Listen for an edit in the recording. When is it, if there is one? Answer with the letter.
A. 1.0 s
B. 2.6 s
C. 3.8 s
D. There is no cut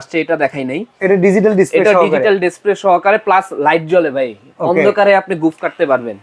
D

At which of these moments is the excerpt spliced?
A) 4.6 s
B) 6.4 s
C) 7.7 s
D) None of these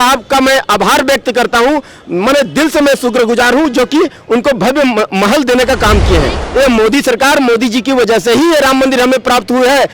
B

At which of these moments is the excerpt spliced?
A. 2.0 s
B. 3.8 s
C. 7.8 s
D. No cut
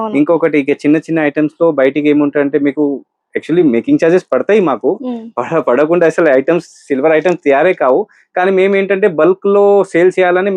D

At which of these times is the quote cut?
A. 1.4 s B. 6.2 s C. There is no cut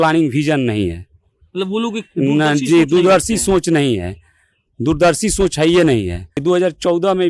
B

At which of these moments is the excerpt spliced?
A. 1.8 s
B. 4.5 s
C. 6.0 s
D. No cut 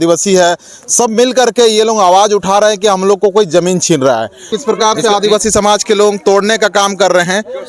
B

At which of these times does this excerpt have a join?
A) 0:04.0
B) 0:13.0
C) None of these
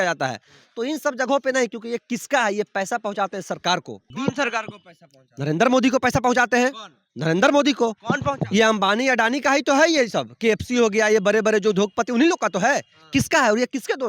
A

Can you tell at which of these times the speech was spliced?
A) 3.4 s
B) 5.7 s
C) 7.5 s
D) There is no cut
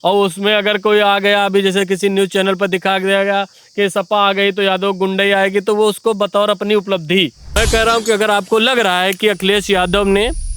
C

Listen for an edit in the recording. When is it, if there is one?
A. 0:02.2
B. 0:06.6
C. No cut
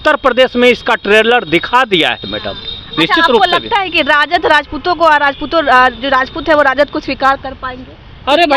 C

